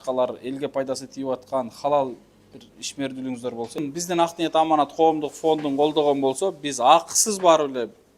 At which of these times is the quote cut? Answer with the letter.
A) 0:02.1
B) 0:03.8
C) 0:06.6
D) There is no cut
B